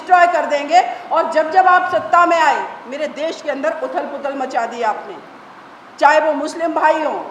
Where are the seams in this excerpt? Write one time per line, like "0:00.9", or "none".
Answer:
none

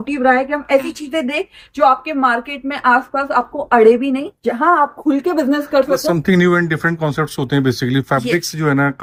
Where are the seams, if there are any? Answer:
none

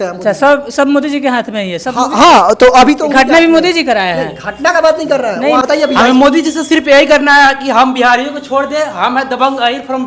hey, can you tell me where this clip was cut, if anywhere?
0:05.6

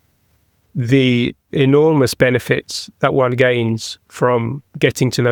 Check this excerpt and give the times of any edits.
none

